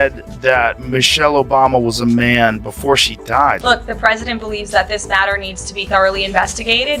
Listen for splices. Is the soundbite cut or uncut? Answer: cut